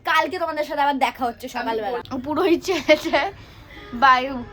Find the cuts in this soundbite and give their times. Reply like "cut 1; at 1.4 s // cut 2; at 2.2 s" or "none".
cut 1; at 2.0 s